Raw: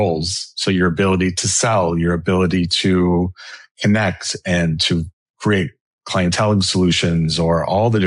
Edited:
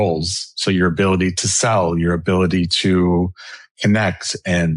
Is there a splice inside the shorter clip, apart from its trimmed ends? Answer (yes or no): no